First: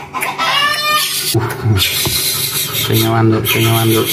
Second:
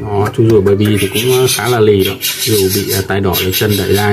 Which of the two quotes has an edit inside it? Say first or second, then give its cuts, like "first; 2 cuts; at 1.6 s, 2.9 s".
first; 1 cut; at 1.4 s